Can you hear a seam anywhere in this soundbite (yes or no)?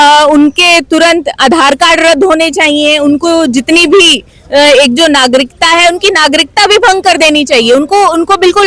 no